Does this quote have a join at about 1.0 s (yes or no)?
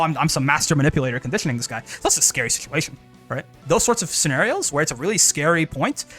no